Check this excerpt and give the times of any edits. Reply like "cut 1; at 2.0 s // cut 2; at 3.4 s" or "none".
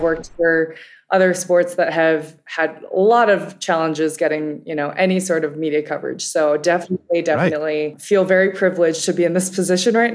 cut 1; at 8.0 s